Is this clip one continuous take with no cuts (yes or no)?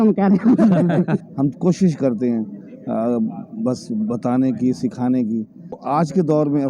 no